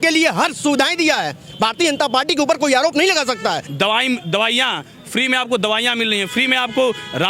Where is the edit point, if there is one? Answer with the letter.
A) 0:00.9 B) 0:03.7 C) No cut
B